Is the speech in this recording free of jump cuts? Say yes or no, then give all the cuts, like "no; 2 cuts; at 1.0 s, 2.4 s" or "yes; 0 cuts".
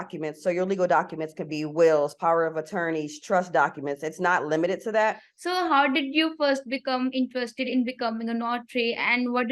no; 1 cut; at 5.3 s